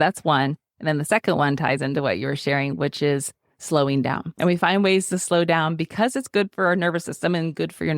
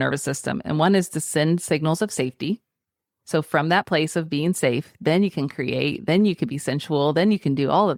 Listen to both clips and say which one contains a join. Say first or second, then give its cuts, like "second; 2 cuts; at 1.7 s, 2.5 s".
first; 1 cut; at 4.3 s